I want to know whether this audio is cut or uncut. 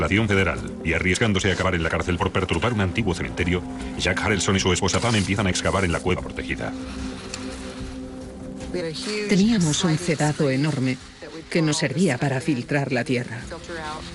cut